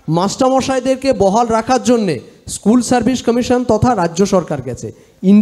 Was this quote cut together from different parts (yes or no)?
no